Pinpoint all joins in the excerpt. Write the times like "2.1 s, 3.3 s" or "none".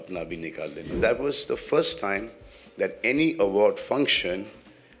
1.0 s